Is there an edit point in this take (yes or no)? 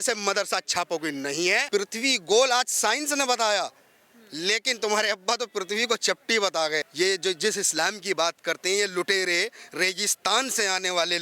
yes